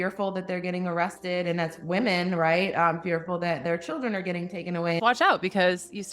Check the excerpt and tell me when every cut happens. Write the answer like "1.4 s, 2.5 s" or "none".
5.0 s